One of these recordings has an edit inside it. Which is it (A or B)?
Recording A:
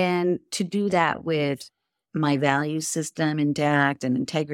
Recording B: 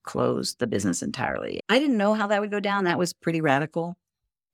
B